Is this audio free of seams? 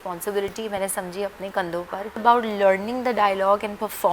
no; 1 cut; at 2.2 s

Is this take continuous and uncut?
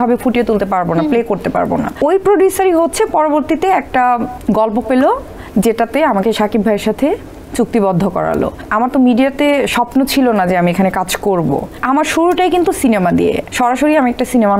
no; 5 cuts; at 2.0 s, 4.3 s, 8.6 s, 11.8 s, 13.5 s

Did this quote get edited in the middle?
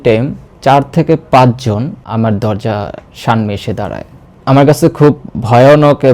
yes; 2 cuts; at 2.0 s, 4.3 s

